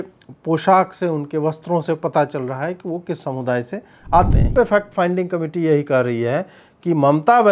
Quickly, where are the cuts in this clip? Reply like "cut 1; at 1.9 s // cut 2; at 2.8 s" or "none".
cut 1; at 4.5 s